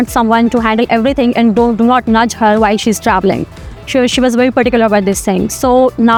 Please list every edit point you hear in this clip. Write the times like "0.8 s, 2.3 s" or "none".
none